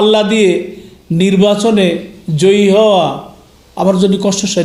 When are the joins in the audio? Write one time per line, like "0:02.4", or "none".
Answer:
none

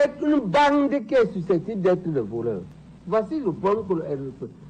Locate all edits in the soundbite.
0:02.7

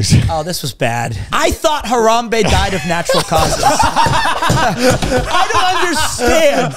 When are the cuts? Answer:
0:01.2

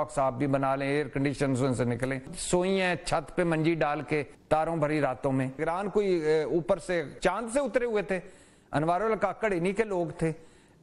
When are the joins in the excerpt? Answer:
0:02.3
0:04.3
0:05.6
0:07.1

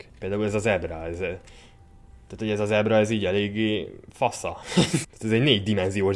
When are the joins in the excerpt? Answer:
0:05.1

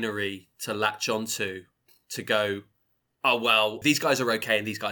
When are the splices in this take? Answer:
0:03.8

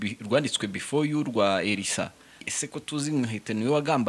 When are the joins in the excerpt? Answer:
0:02.4

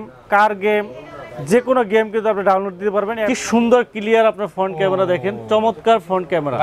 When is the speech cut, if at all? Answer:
0:03.3

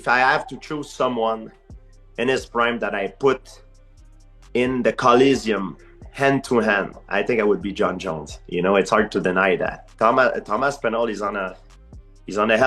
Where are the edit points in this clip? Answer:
0:09.8

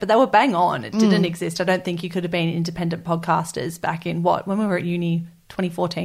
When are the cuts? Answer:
none

